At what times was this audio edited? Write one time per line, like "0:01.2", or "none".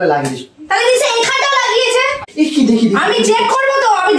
0:02.2